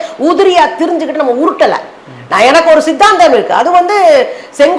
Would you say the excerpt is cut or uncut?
uncut